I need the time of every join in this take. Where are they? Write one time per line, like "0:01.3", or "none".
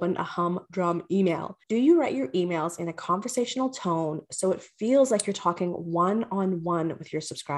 0:01.5